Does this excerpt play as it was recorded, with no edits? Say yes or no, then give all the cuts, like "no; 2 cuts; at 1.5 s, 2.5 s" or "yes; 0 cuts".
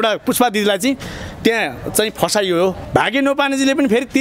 no; 1 cut; at 2.8 s